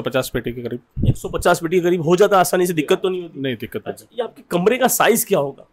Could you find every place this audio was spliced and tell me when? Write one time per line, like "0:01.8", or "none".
none

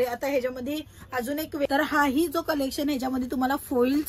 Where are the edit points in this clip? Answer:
0:01.7

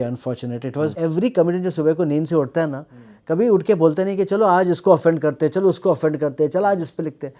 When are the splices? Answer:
0:00.9

